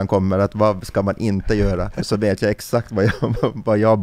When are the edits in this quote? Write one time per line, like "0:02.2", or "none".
0:02.0